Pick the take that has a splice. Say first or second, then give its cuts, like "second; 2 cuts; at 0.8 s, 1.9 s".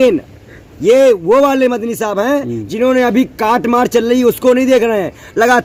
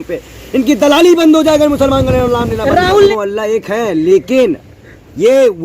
second; 1 cut; at 3.1 s